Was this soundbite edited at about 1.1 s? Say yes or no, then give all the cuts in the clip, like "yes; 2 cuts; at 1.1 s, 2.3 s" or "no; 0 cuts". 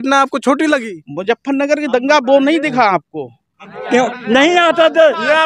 no; 1 cut; at 3.7 s